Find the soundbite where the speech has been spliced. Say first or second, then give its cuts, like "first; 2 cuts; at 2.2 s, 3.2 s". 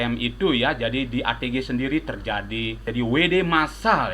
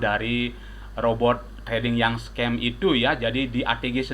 first; 1 cut; at 2.9 s